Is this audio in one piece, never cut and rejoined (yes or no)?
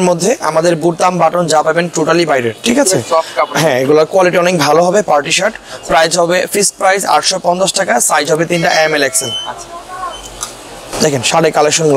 yes